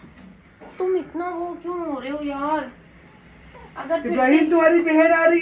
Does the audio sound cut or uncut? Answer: uncut